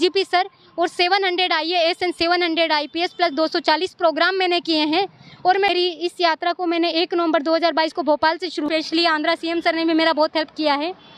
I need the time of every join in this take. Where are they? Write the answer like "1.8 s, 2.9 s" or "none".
5.7 s, 8.7 s